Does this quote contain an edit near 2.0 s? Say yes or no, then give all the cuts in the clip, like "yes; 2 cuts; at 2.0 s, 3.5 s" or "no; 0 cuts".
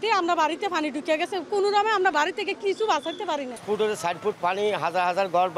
no; 1 cut; at 3.5 s